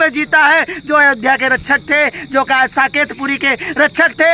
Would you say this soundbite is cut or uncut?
uncut